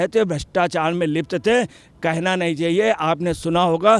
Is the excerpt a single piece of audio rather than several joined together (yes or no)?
yes